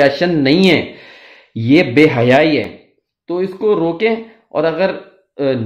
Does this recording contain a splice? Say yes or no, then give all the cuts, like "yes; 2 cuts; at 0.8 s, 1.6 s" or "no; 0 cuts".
no; 0 cuts